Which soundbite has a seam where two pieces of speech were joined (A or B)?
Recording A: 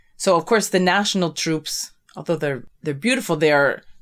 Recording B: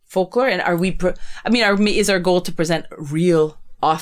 A